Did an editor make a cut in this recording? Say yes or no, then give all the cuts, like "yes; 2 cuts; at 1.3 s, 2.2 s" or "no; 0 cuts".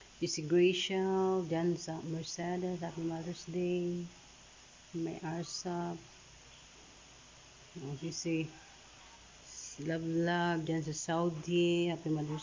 no; 0 cuts